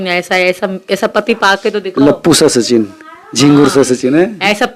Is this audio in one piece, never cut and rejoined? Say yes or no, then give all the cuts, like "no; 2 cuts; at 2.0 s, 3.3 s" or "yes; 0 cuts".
yes; 0 cuts